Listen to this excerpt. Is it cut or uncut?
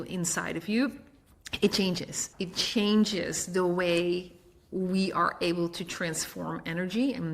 cut